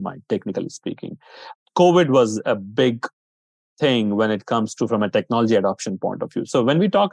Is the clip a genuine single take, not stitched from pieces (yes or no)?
yes